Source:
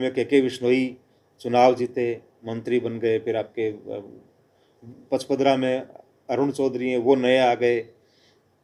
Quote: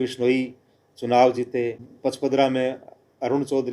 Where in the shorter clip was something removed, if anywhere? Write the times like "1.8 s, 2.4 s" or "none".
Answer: 1.9 s